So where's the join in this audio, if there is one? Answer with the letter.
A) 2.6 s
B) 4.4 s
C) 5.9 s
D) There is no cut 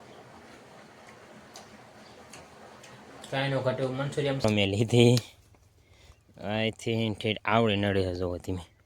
B